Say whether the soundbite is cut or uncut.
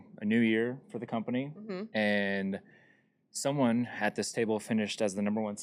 uncut